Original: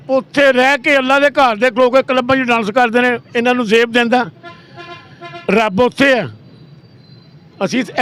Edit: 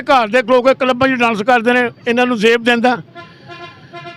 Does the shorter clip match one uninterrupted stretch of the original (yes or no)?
yes